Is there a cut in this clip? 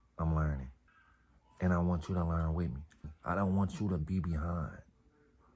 yes; 1 cut; at 3.0 s

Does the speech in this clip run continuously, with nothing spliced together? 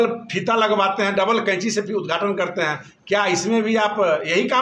yes; 0 cuts

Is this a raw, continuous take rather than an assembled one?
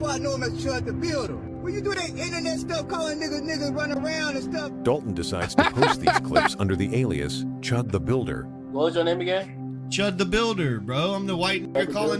yes; 0 cuts

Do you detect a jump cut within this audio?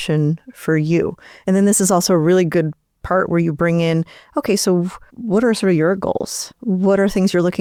no; 0 cuts

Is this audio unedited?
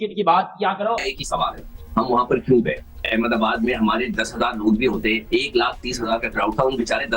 no; 2 cuts; at 1.0 s, 2.9 s

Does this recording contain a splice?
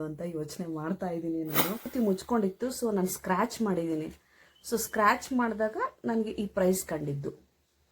yes; 1 cut; at 1.9 s

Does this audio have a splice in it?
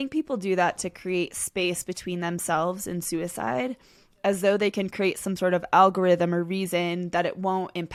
no; 0 cuts

